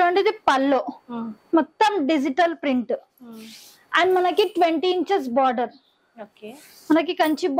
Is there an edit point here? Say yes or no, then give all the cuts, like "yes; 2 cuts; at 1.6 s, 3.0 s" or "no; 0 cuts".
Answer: no; 0 cuts